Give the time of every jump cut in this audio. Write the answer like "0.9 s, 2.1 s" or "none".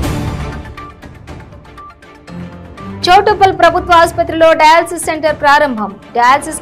none